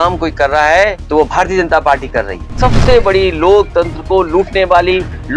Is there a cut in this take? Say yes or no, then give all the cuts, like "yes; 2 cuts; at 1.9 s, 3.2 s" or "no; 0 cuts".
yes; 2 cuts; at 1.0 s, 2.5 s